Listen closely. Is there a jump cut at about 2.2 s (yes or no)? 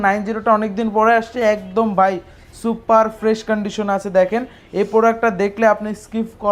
no